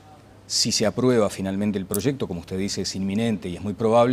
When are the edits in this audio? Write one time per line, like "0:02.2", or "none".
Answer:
none